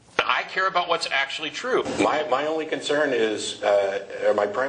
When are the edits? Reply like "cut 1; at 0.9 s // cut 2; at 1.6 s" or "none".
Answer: cut 1; at 1.9 s